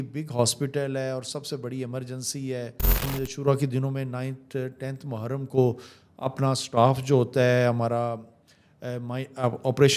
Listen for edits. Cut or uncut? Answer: cut